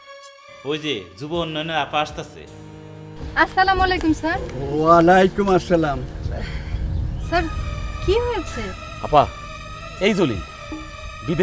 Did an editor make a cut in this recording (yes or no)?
no